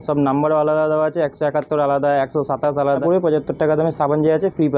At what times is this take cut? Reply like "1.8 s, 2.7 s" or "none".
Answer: 3.0 s